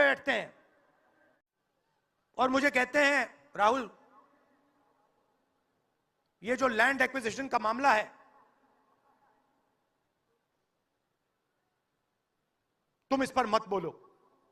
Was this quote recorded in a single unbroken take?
no; 1 cut; at 1.4 s

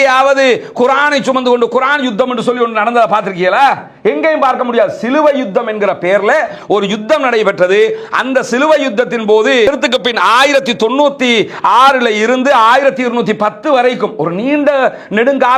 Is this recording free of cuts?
yes; 0 cuts

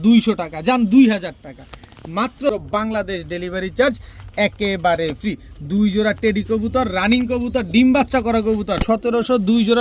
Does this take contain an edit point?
yes; 2 cuts; at 2.5 s, 8.8 s

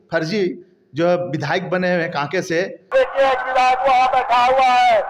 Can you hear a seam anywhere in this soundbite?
no; 0 cuts

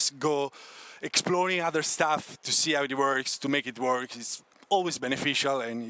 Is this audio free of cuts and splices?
yes; 0 cuts

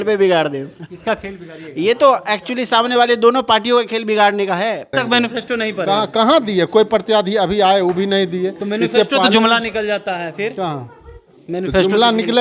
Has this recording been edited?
yes; 1 cut; at 4.9 s

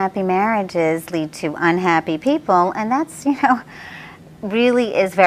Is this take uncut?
no; 1 cut; at 2.6 s

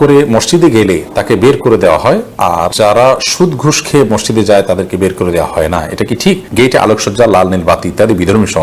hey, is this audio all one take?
no; 2 cuts; at 2.7 s, 6.5 s

